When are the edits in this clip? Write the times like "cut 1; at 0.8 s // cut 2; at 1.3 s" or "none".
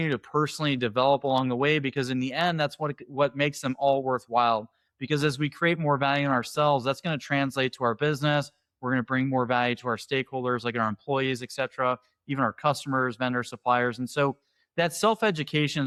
none